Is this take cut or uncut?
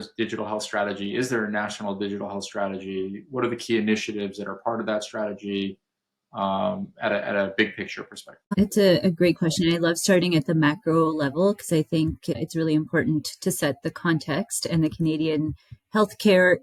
uncut